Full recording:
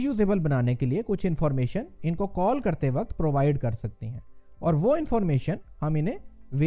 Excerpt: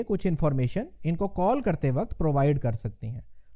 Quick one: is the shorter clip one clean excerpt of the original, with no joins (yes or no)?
yes